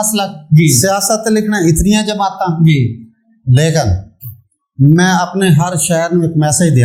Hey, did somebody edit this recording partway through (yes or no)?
no